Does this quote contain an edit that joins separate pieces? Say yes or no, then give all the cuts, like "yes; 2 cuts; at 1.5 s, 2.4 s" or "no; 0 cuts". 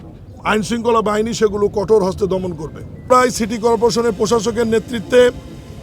yes; 1 cut; at 3.1 s